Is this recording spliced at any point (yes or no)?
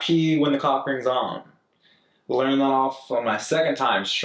no